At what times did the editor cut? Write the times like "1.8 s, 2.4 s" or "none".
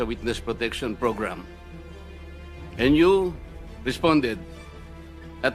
1.5 s, 2.8 s

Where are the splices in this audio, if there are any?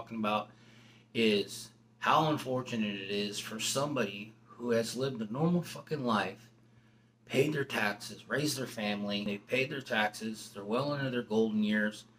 9.3 s

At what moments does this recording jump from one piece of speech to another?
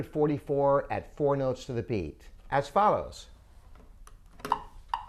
none

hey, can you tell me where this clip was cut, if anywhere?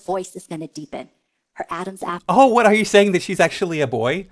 none

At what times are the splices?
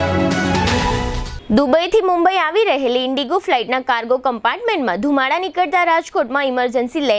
none

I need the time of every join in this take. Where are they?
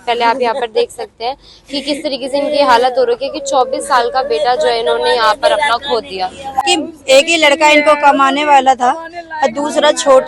6.6 s

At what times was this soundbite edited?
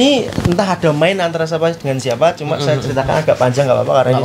none

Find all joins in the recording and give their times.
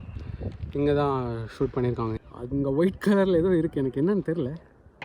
2.2 s

